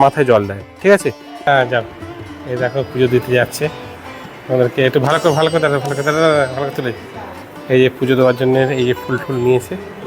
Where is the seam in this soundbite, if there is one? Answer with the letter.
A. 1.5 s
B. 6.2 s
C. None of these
A